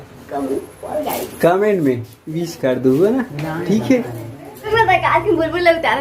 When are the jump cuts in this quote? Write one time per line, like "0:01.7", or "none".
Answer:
0:04.5